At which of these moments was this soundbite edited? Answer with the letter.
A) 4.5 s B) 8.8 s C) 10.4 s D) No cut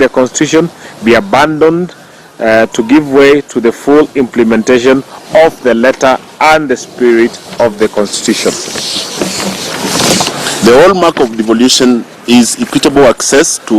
C